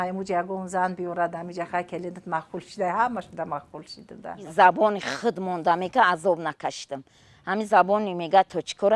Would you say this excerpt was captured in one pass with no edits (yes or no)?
yes